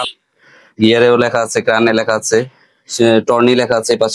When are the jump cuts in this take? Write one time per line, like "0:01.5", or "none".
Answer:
none